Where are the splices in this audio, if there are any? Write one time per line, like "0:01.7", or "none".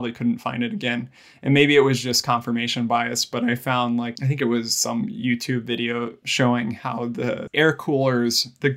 0:04.2
0:06.2
0:07.5